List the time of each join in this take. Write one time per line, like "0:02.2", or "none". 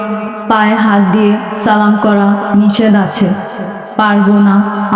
none